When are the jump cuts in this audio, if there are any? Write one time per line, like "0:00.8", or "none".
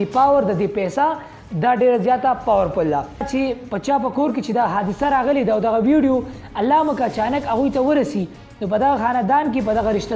0:03.3